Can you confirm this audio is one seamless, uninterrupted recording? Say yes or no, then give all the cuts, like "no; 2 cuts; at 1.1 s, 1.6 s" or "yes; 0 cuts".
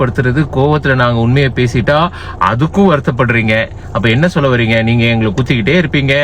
yes; 0 cuts